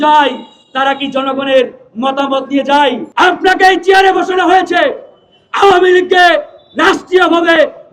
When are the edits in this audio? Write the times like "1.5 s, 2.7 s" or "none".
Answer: 3.1 s